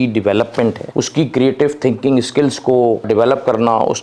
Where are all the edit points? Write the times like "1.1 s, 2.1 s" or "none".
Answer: 0.8 s, 3.0 s